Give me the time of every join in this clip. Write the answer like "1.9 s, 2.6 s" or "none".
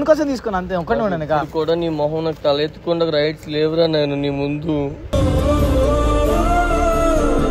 none